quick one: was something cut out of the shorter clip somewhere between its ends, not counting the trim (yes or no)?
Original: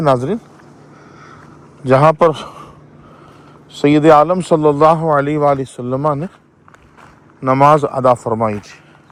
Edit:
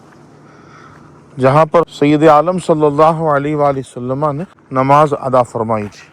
yes